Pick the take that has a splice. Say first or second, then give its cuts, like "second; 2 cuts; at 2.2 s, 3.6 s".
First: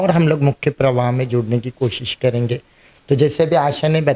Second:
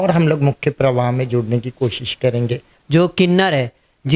second; 1 cut; at 2.7 s